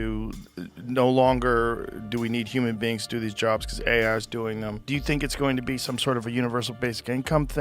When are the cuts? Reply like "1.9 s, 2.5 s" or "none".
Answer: 4.8 s